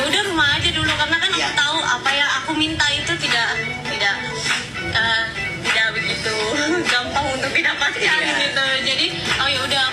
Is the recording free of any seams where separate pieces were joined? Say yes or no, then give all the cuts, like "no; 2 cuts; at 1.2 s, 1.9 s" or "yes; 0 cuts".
yes; 0 cuts